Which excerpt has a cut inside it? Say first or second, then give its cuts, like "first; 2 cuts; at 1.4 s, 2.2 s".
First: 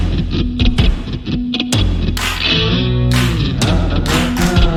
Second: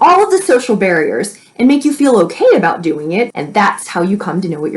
second; 1 cut; at 3.3 s